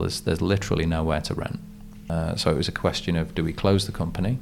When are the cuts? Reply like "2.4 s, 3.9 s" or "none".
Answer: 1.9 s